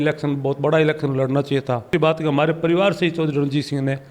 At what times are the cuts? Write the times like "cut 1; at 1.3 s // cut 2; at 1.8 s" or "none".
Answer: cut 1; at 1.9 s